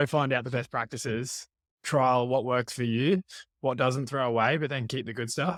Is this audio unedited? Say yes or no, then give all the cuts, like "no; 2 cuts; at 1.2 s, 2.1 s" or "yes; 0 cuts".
yes; 0 cuts